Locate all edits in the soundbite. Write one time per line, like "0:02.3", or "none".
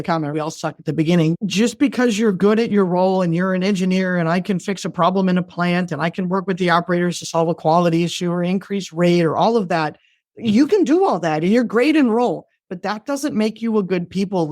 0:01.4